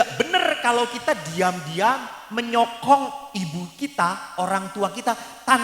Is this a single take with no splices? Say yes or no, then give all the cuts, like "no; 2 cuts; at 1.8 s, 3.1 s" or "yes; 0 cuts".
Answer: yes; 0 cuts